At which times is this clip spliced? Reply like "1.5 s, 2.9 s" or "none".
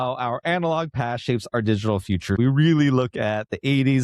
2.4 s